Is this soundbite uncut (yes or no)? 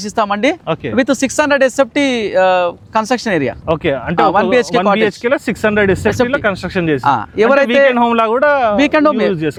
yes